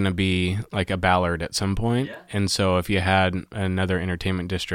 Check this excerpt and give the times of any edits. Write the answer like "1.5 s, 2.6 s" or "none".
none